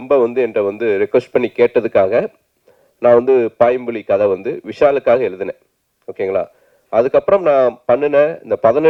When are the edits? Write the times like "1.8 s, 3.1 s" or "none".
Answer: none

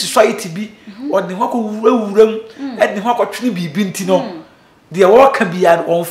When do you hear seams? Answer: none

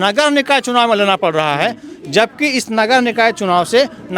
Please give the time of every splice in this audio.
none

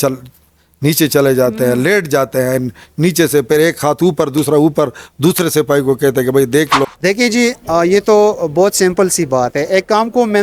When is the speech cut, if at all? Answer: 6.8 s

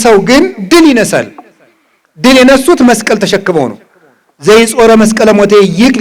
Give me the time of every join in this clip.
none

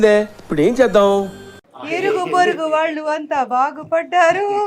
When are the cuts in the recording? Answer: 1.7 s

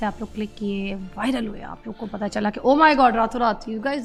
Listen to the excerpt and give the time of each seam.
none

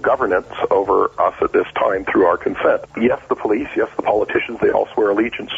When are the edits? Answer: 1.1 s, 2.9 s

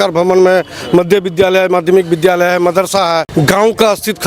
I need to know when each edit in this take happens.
3.3 s

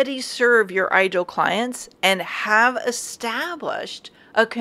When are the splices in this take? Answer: none

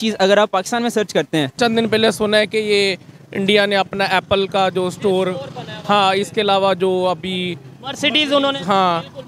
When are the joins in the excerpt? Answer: 1.6 s

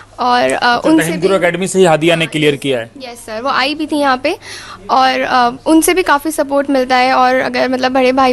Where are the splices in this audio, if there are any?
none

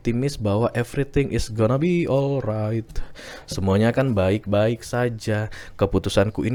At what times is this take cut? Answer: none

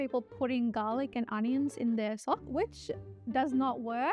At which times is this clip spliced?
2.5 s

